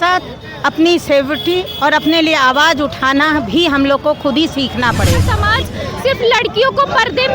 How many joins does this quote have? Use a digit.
1